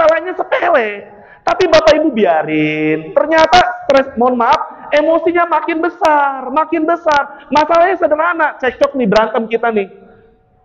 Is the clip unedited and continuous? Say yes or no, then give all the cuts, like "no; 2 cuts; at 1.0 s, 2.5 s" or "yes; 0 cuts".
yes; 0 cuts